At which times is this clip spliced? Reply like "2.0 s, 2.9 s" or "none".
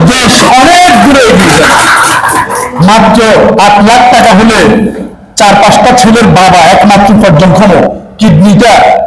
2.6 s